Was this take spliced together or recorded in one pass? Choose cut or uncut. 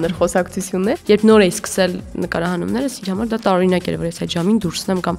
cut